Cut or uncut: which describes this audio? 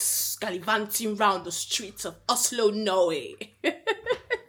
uncut